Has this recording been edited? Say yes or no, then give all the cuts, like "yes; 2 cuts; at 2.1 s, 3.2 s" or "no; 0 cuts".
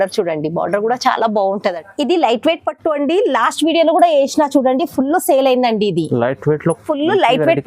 yes; 1 cut; at 1.8 s